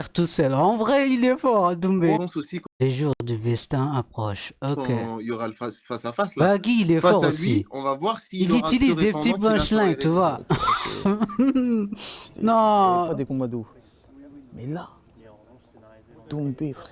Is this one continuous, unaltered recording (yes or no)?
no